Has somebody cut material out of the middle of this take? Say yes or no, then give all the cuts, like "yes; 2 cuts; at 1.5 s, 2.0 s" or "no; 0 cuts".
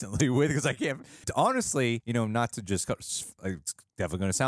yes; 3 cuts; at 1.2 s, 2.0 s, 3.4 s